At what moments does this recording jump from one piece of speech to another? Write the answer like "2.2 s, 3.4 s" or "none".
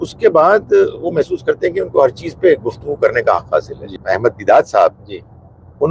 4.0 s